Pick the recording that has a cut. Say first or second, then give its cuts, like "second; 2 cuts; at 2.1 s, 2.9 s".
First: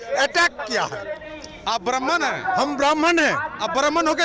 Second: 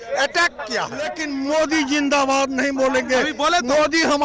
second; 1 cut; at 1.2 s